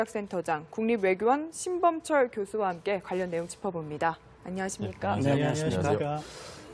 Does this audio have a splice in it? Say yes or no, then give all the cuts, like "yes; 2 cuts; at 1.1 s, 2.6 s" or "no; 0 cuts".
no; 0 cuts